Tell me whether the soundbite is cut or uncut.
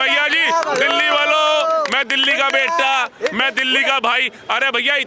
uncut